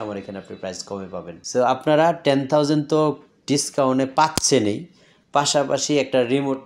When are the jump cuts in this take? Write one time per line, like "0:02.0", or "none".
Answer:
0:01.4